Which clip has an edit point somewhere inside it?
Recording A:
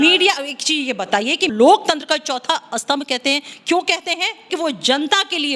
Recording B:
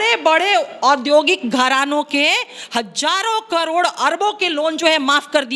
A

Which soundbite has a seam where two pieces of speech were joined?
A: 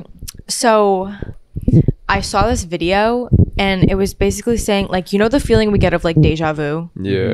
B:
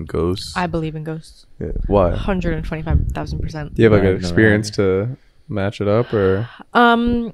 A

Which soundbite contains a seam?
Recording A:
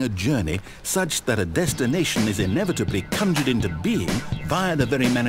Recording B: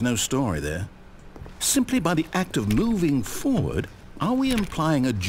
B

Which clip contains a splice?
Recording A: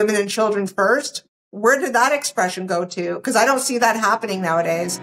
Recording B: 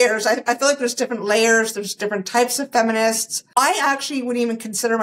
B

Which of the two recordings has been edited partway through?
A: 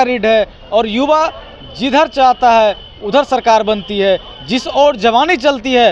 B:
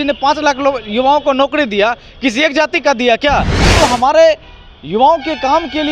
B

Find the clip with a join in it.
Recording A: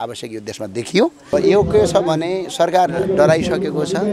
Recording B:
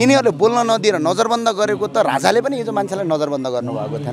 A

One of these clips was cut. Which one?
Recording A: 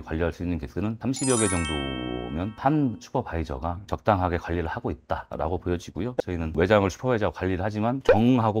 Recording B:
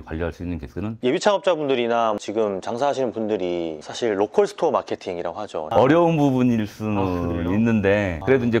B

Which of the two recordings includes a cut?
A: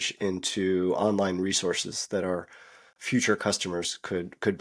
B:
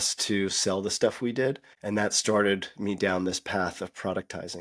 B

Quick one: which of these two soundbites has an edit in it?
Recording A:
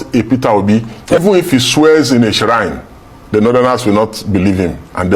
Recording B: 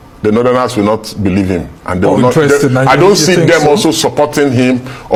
A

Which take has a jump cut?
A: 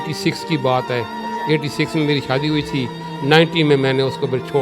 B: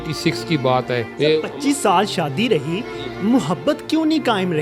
B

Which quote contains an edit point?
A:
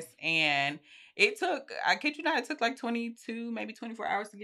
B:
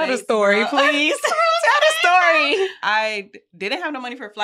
B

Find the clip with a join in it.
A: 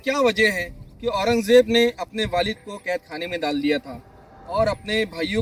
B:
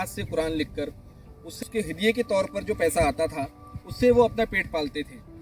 B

